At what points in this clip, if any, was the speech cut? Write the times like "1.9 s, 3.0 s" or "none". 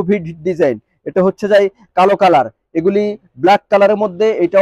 none